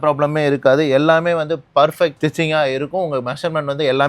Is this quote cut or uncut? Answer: cut